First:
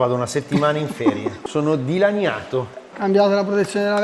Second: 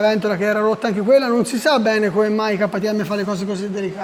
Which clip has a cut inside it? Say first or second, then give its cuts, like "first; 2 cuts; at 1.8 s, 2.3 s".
first; 1 cut; at 2.9 s